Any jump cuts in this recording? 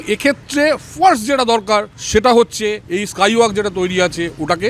yes; 2 cuts; at 2.0 s, 2.9 s

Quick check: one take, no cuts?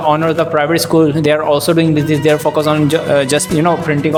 yes; 0 cuts

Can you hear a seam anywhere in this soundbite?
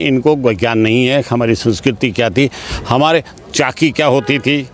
no; 0 cuts

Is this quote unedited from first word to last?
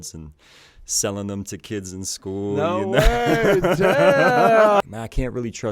no; 1 cut; at 4.8 s

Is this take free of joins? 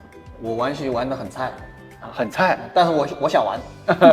yes; 0 cuts

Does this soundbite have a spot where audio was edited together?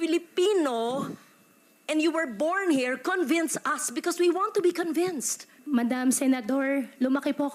yes; 1 cut; at 5.6 s

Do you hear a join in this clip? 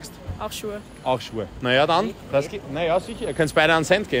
no; 0 cuts

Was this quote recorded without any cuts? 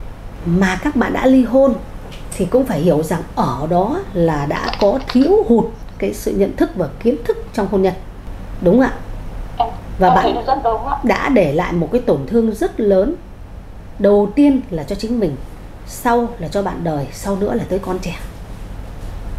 yes; 0 cuts

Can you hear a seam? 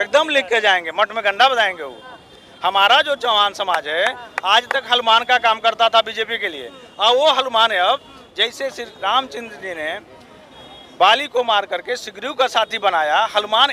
no; 0 cuts

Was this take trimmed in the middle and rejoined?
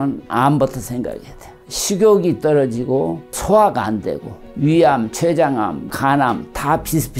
yes; 3 cuts; at 3.3 s, 4.5 s, 5.9 s

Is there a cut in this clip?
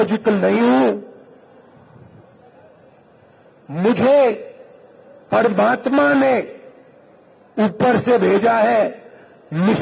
no; 0 cuts

